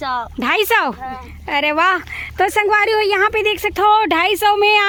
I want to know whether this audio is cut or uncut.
uncut